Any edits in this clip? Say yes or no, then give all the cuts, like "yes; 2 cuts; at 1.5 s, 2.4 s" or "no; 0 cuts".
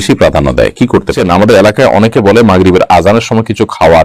yes; 1 cut; at 1.2 s